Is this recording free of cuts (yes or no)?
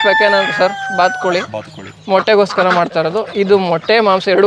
yes